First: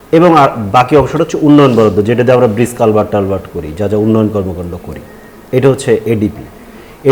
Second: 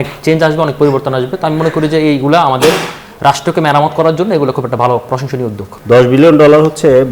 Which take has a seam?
second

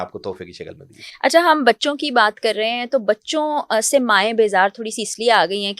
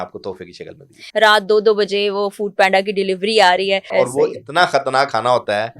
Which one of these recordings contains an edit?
second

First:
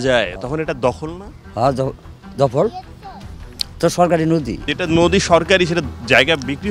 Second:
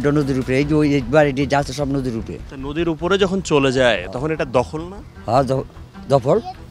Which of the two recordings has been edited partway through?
first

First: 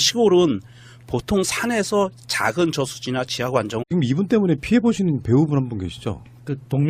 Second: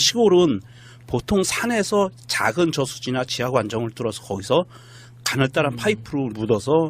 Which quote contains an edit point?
second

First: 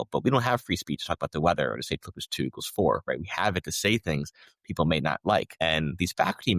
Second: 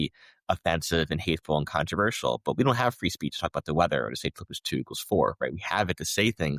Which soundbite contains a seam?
first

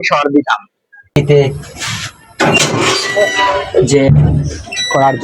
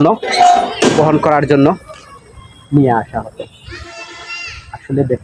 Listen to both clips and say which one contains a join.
first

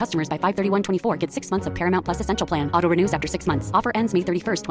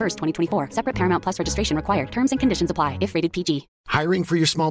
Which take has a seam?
second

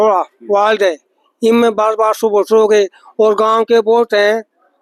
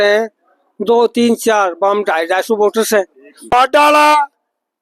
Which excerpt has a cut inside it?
second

